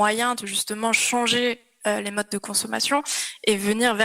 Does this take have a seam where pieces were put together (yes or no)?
no